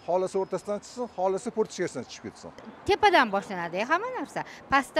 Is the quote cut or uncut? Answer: cut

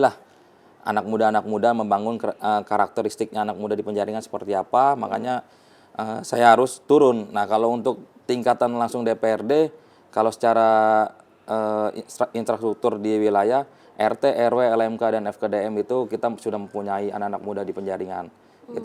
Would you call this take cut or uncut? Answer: uncut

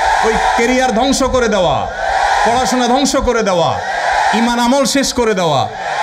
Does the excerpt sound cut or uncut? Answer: uncut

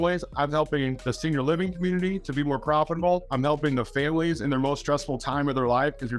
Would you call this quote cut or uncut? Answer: cut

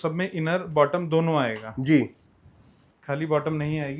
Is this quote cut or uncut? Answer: uncut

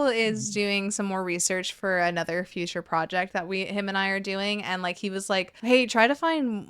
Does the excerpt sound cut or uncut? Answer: cut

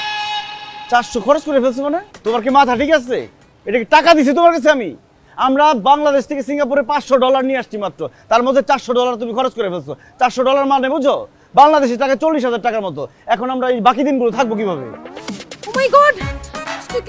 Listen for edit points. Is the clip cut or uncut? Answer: cut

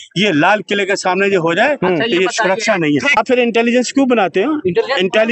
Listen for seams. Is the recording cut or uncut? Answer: cut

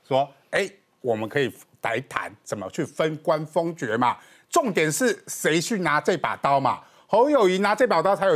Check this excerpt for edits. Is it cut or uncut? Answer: uncut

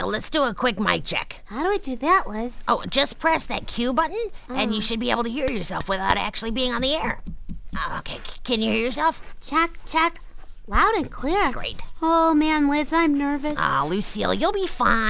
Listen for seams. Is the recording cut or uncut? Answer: uncut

